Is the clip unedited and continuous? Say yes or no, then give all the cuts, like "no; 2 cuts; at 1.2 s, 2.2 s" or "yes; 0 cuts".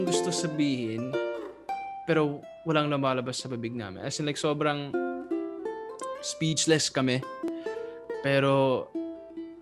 yes; 0 cuts